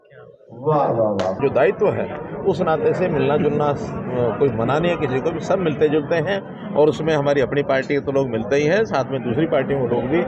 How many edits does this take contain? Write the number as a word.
one